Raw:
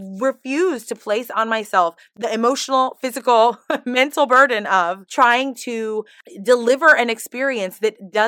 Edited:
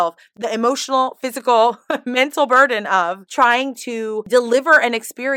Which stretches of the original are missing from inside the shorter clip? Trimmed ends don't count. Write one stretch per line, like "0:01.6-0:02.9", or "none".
0:06.0-0:06.4